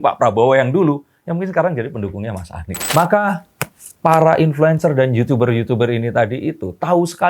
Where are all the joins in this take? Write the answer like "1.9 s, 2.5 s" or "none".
2.7 s